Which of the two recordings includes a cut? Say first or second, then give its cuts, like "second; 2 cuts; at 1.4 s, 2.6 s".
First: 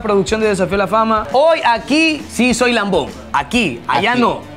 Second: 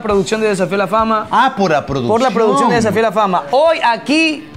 first; 3 cuts; at 1.3 s, 2.2 s, 3.2 s